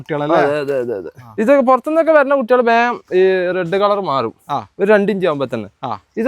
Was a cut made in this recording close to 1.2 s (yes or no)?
yes